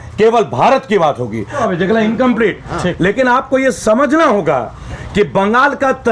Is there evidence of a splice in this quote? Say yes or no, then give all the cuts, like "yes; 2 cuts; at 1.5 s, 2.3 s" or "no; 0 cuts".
yes; 1 cut; at 1.6 s